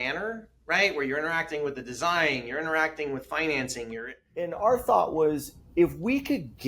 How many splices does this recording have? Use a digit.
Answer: 1